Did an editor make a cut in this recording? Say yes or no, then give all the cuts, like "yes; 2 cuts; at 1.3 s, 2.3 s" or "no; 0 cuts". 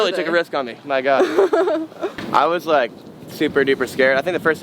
yes; 1 cut; at 2.1 s